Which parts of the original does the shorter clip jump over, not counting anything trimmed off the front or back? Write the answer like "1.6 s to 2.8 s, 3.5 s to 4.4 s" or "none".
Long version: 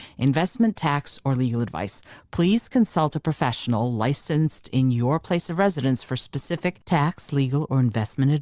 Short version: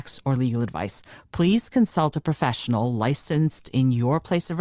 none